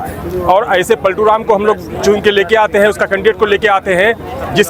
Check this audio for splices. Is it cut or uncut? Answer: uncut